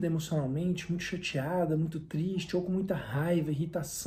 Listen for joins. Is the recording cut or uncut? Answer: uncut